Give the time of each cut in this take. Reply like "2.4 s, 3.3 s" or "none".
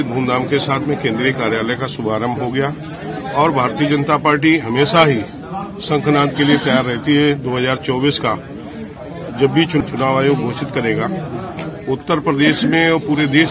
none